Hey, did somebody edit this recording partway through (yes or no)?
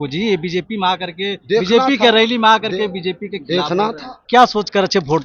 yes